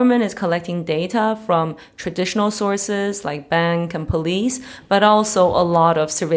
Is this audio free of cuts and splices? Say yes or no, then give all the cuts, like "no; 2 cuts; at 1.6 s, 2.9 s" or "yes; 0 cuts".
yes; 0 cuts